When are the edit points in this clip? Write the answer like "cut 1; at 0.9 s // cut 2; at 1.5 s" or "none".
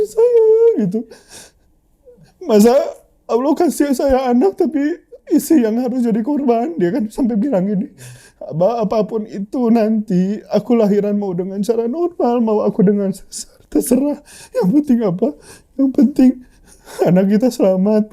none

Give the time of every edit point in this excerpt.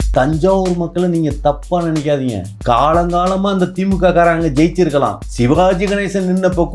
cut 1; at 2.5 s // cut 2; at 5.2 s

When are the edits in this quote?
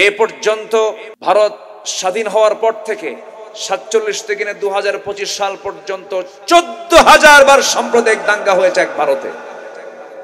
cut 1; at 1.1 s

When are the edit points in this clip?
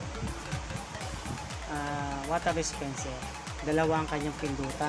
none

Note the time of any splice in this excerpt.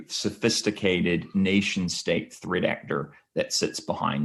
none

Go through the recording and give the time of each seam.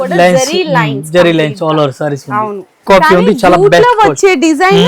cut 1; at 2.8 s

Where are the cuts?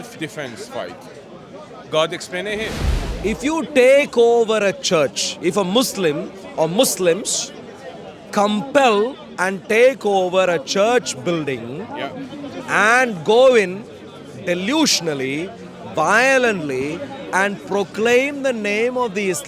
cut 1; at 2.8 s

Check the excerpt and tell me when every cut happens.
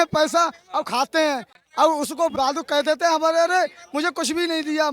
cut 1; at 2.3 s

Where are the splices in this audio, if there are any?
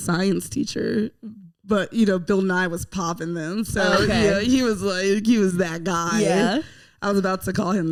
none

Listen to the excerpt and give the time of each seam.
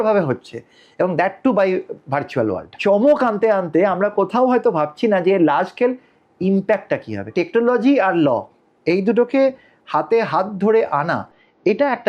cut 1; at 2.8 s // cut 2; at 7.3 s

